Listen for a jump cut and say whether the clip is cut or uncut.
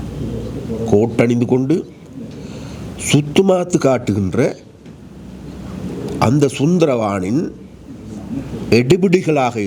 uncut